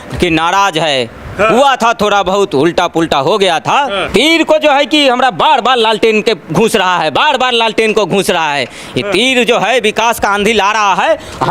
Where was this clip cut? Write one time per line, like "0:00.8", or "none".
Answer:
0:04.1